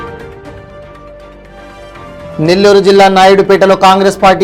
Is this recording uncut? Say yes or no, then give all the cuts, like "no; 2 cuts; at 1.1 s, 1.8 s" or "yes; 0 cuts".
yes; 0 cuts